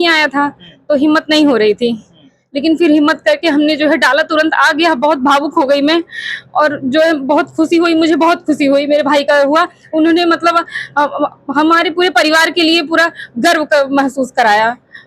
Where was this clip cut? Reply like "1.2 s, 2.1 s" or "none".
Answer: none